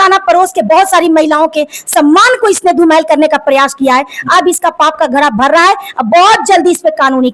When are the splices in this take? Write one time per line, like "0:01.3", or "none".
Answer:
none